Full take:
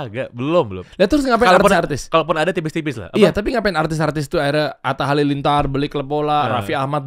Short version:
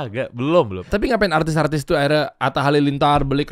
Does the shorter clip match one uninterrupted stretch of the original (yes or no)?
no